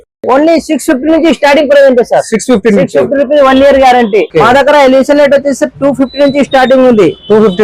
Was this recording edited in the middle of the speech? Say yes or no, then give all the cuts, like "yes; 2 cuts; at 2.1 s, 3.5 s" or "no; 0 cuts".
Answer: yes; 1 cut; at 4.3 s